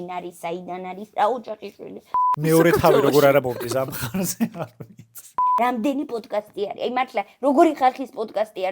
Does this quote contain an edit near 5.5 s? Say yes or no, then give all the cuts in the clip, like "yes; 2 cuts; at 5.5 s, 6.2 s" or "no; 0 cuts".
yes; 2 cuts; at 2.2 s, 5.5 s